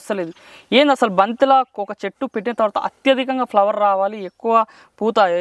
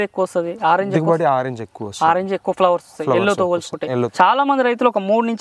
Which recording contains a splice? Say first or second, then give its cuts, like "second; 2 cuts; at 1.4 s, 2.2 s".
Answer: second; 1 cut; at 4.1 s